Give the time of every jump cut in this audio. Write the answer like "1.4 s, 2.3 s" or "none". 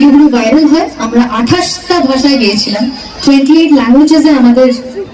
none

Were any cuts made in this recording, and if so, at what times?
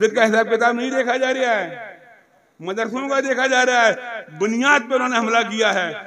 none

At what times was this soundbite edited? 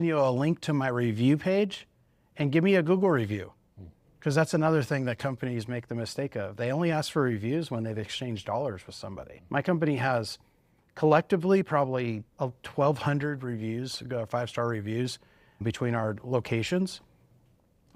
9.3 s, 15.6 s

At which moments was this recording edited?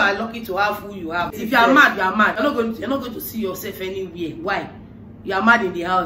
1.4 s, 2.4 s

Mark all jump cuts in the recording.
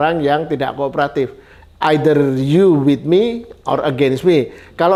none

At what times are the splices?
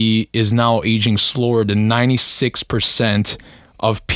none

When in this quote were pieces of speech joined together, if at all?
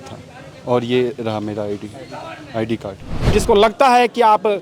3.3 s

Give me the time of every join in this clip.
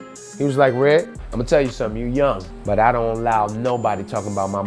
1.2 s, 2.5 s

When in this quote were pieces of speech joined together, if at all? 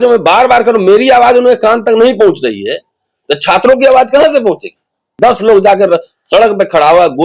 5.1 s

